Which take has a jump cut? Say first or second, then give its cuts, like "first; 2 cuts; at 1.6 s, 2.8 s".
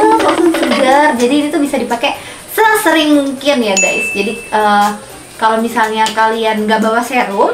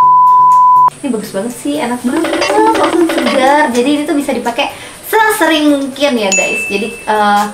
second; 1 cut; at 1.0 s